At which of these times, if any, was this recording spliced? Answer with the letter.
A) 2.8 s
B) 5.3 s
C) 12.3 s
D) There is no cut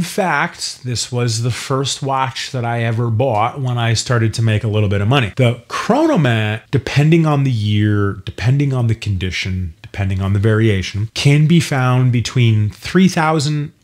B